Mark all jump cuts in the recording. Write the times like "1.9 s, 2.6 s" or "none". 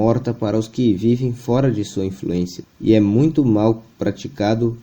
2.6 s